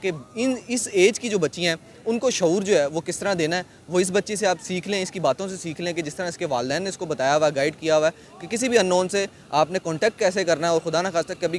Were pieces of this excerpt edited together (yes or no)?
no